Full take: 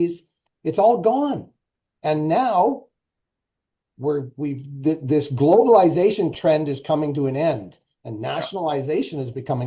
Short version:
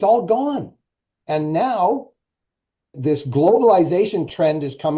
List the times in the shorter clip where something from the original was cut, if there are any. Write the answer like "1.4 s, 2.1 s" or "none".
3.0 s